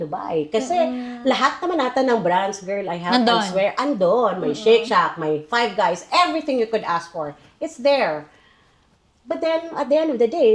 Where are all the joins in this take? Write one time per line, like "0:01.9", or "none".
none